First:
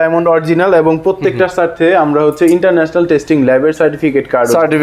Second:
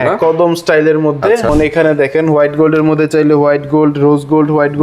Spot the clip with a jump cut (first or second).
second